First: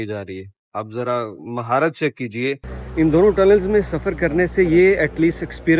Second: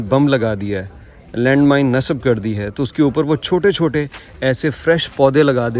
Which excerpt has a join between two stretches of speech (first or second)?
first